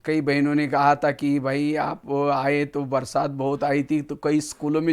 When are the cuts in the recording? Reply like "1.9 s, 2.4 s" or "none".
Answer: 3.3 s